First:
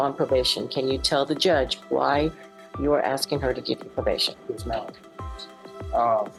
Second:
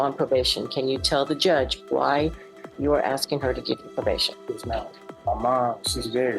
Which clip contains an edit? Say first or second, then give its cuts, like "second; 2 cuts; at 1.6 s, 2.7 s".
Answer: second; 1 cut; at 5.0 s